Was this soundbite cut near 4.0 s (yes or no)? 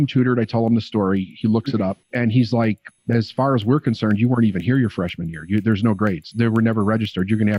no